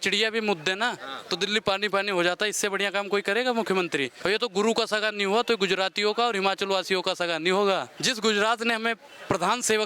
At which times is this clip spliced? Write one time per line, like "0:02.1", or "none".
0:04.1
0:07.9